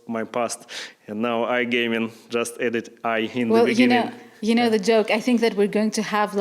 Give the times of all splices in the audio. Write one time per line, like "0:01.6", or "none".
none